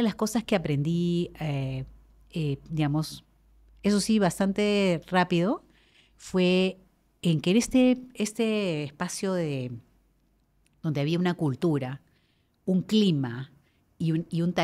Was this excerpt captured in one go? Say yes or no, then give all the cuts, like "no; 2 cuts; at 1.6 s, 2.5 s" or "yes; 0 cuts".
yes; 0 cuts